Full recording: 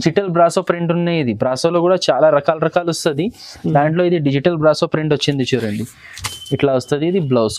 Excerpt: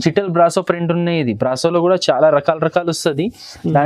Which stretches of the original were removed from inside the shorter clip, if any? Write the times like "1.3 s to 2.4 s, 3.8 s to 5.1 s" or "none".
none